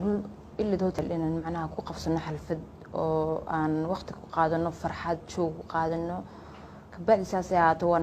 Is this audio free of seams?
no; 1 cut; at 1.0 s

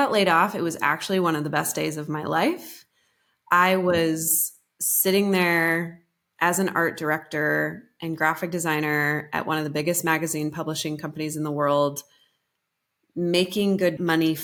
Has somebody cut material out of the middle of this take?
no; 0 cuts

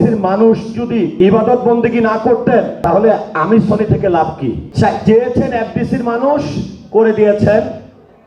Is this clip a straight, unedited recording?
no; 3 cuts; at 1.1 s, 2.7 s, 4.6 s

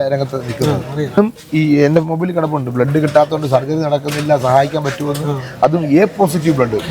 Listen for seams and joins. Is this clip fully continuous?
no; 1 cut; at 1.2 s

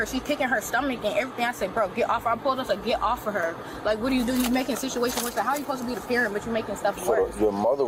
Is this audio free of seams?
yes; 0 cuts

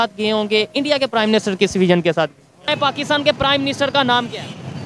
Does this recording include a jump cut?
yes; 1 cut; at 2.7 s

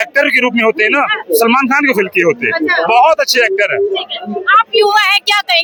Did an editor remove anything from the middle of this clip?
no; 0 cuts

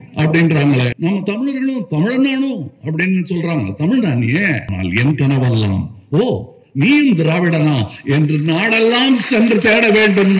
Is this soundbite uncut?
no; 2 cuts; at 0.9 s, 4.7 s

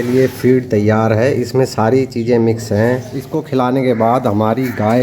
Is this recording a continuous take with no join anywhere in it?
no; 1 cut; at 3.4 s

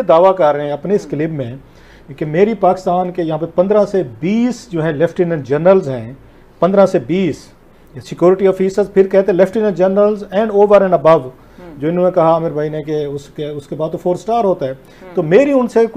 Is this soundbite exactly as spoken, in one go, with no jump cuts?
yes; 0 cuts

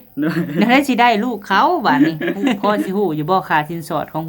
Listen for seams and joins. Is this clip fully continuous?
no; 1 cut; at 2.6 s

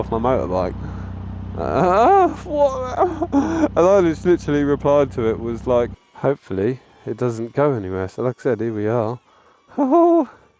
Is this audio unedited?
no; 1 cut; at 6.0 s

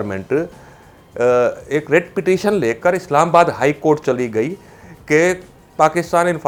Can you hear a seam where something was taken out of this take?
no; 0 cuts

